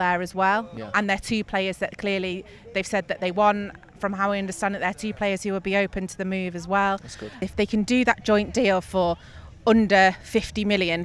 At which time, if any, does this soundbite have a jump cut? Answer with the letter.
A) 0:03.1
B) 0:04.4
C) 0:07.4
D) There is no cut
C